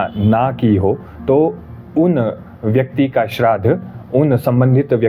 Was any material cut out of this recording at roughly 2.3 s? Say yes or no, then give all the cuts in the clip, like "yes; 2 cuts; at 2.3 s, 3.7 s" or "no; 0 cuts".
no; 0 cuts